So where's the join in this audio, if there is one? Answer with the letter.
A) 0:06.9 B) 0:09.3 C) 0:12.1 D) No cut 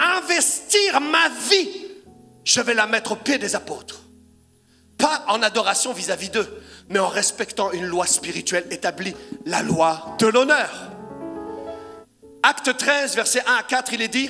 C